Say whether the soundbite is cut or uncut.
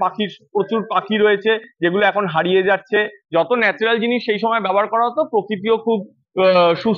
uncut